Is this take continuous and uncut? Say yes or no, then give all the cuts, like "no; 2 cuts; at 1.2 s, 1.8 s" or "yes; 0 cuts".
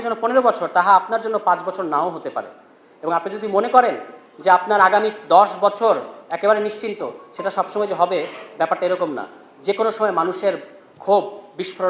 yes; 0 cuts